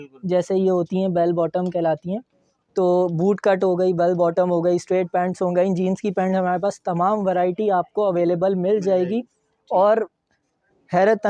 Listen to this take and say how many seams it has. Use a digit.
0